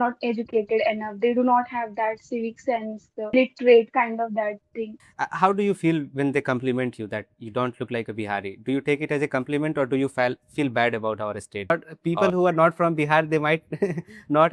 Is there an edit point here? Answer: yes; 3 cuts; at 3.3 s, 5.0 s, 11.7 s

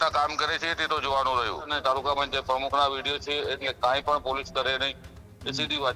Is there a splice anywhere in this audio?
yes; 1 cut; at 1.7 s

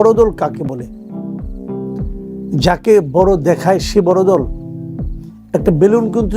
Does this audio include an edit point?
yes; 2 cuts; at 1.1 s, 2.5 s

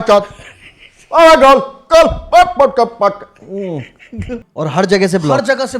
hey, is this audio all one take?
no; 1 cut; at 4.5 s

